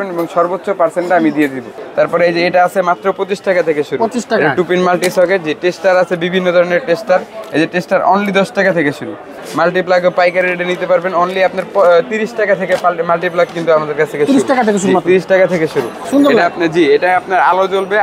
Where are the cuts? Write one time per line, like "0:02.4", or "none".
0:01.8
0:09.4
0:16.0